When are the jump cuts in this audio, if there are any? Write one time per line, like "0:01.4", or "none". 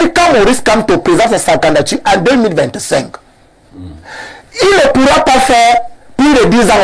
none

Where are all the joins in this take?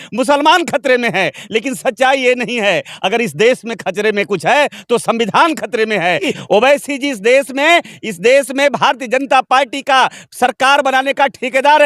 0:06.4

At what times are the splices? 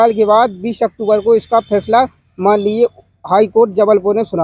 none

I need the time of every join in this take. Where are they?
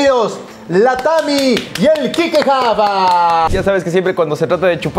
0:03.5

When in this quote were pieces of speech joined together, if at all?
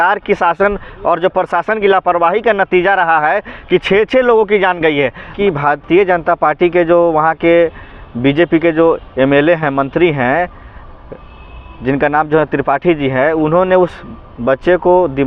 0:05.4

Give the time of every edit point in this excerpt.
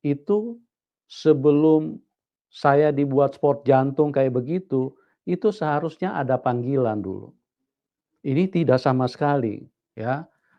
none

